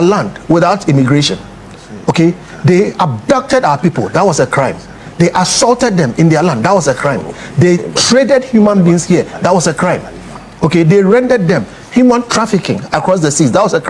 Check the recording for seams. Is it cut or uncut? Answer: uncut